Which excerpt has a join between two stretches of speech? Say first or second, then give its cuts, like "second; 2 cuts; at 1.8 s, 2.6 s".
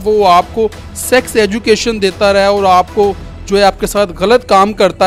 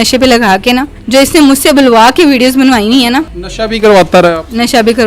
second; 1 cut; at 0.9 s